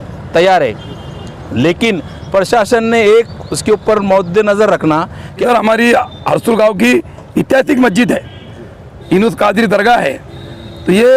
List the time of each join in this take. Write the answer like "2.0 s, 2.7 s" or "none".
5.4 s